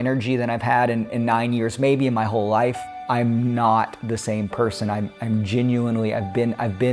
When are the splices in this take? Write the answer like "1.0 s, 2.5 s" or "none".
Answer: 3.0 s